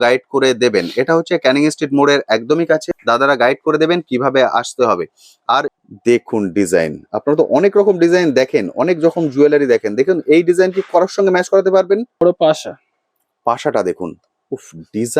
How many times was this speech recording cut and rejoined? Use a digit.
3